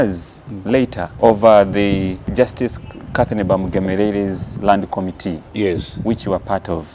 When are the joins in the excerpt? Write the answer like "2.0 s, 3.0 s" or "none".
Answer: 1.0 s, 2.2 s